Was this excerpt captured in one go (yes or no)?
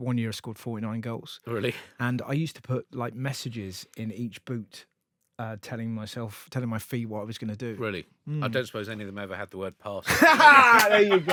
yes